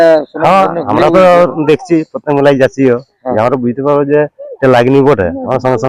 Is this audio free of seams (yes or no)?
yes